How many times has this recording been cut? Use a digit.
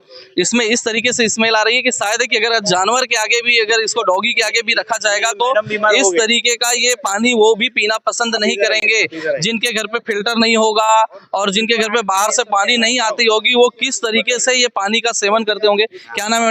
0